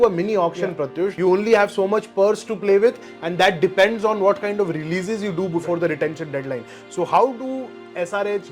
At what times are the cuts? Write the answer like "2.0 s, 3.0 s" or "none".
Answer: 1.1 s